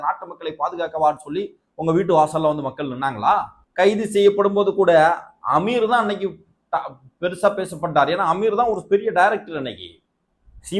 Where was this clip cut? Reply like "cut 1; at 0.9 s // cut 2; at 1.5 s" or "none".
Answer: cut 1; at 3.6 s